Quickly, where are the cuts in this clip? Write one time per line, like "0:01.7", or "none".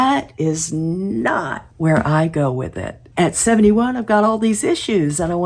0:01.6
0:03.0